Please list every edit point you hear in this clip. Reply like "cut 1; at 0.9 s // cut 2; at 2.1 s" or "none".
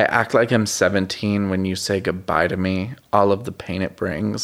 none

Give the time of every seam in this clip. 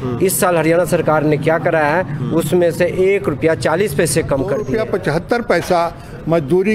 cut 1; at 4.7 s

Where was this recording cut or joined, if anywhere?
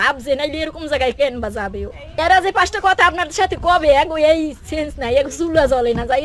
cut 1; at 2.0 s

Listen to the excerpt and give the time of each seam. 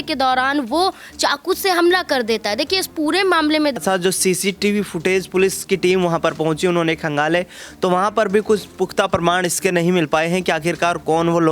cut 1; at 3.8 s

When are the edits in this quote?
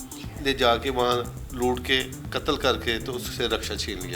cut 1; at 1.4 s

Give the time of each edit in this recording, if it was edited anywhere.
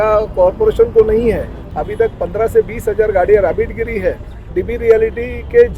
cut 1; at 1.7 s // cut 2; at 4.4 s

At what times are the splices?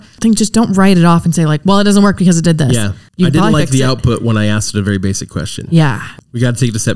cut 1; at 3.0 s // cut 2; at 6.1 s

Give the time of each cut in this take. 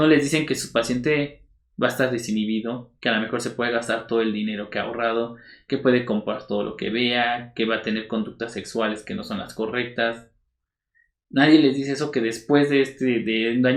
none

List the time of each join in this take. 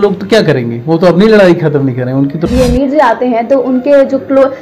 cut 1; at 2.5 s

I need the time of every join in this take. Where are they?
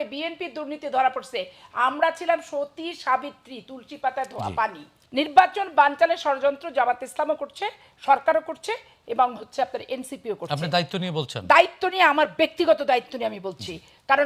none

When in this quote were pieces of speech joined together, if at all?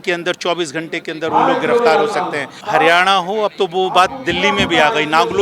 cut 1; at 2.5 s

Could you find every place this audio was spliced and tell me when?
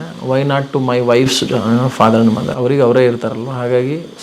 cut 1; at 2.5 s

